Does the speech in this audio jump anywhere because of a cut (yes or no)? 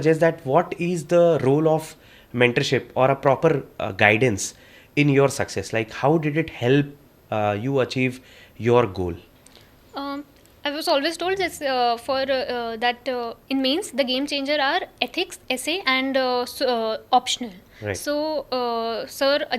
no